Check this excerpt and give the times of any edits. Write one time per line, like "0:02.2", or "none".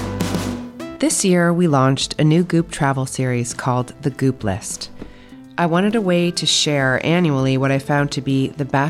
0:00.9

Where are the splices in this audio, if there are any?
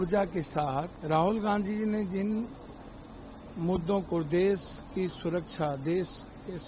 0:00.9

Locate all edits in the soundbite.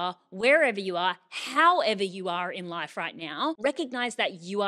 none

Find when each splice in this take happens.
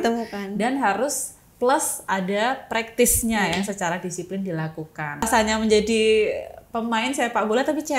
0:05.3

